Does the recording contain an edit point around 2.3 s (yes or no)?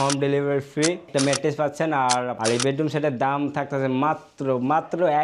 yes